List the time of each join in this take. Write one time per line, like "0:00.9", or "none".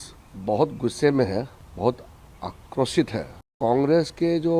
0:01.6
0:03.6